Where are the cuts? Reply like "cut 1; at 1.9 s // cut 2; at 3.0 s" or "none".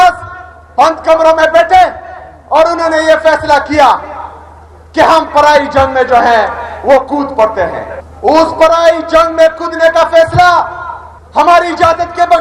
none